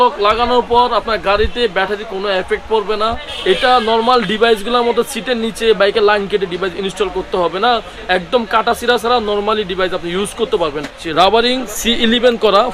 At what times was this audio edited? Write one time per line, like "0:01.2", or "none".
0:03.3
0:11.0